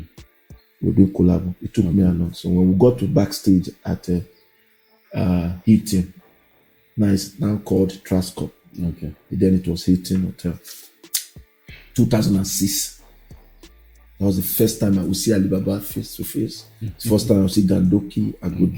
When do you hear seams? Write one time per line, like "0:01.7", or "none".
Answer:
none